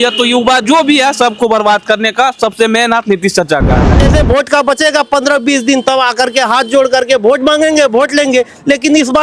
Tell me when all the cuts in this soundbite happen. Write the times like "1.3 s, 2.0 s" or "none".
3.9 s